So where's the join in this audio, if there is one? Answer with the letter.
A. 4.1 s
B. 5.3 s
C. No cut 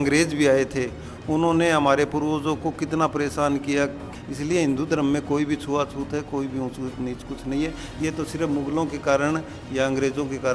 A